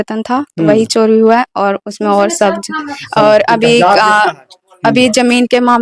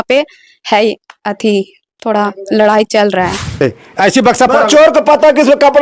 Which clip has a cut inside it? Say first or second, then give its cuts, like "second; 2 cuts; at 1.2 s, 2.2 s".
second; 1 cut; at 3.6 s